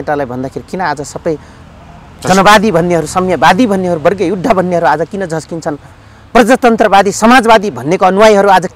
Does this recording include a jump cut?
no; 0 cuts

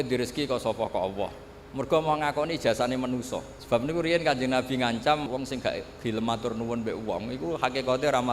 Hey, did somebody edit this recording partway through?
yes; 2 cuts; at 3.5 s, 5.2 s

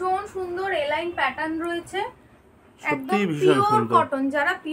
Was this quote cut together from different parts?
no; 0 cuts

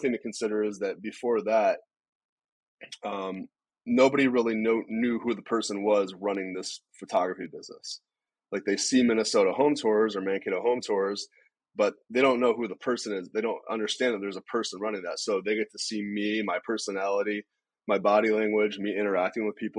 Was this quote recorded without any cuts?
yes; 0 cuts

